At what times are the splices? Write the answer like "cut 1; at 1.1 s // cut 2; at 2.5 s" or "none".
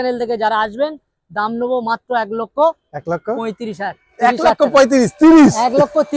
none